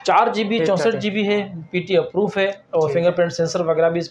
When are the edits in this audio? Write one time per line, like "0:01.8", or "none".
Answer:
none